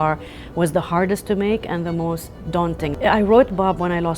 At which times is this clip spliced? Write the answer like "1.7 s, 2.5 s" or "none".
2.9 s

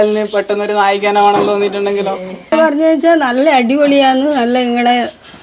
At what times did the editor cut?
2.5 s

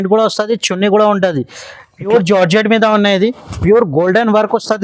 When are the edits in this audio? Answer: 2.1 s

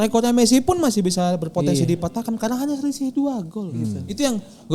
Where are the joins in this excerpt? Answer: none

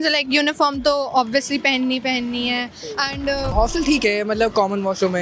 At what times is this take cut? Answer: 3.5 s

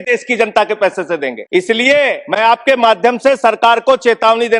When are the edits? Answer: 1.4 s, 2.2 s

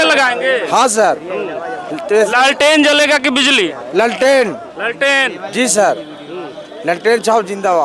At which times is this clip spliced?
none

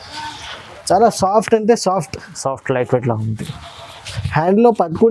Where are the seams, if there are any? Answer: none

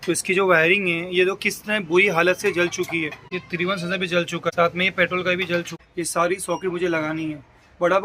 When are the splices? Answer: 3.2 s, 4.5 s, 5.7 s

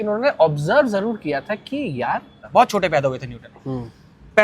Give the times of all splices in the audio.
2.3 s

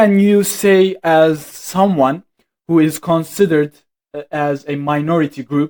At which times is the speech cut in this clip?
none

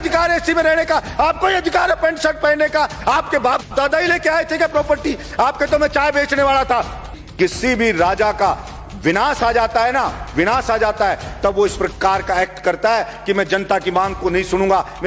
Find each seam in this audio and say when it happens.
7.2 s

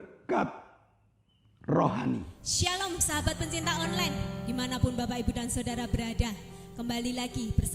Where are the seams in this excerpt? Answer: 2.4 s

